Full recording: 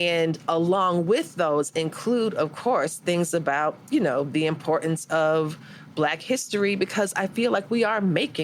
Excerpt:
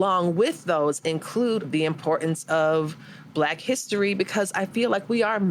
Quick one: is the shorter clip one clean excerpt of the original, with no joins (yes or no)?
no